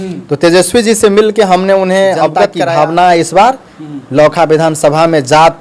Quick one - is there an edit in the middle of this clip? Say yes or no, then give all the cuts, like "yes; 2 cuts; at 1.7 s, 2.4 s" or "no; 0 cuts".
yes; 1 cut; at 2.6 s